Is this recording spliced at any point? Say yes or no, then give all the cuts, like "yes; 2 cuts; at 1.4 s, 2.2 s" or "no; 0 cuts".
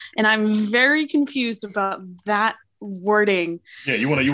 no; 0 cuts